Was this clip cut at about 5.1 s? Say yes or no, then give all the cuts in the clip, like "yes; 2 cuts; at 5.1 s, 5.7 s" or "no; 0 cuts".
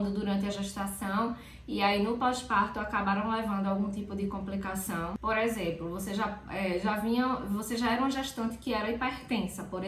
yes; 1 cut; at 5.1 s